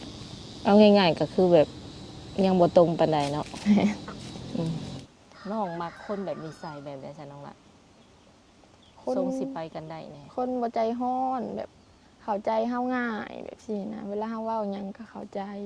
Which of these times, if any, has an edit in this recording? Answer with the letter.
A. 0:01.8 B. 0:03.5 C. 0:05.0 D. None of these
C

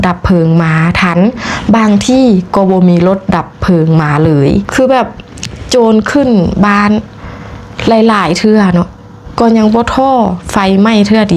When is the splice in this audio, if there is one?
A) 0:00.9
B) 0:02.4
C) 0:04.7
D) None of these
C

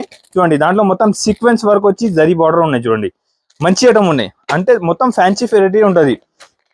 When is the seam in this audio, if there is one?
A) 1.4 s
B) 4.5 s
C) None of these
C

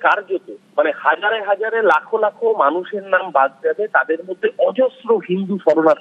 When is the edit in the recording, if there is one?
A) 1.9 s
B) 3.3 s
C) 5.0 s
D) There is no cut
D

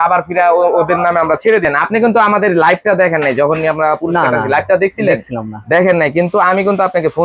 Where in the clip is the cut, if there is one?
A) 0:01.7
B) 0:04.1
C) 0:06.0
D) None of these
A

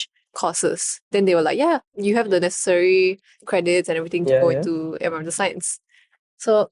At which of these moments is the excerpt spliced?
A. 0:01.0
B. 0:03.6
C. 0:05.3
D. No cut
D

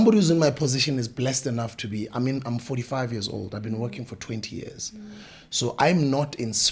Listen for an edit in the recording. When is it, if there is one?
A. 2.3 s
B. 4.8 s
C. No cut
C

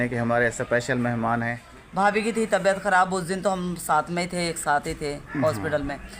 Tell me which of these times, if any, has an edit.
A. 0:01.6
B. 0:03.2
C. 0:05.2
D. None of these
A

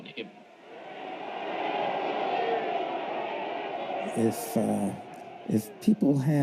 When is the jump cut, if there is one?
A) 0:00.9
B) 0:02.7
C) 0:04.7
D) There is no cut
B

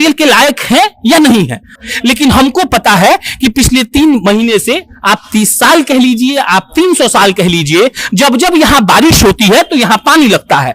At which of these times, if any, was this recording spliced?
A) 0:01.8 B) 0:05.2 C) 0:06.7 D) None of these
A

